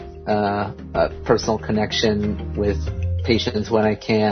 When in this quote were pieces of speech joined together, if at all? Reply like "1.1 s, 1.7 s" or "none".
none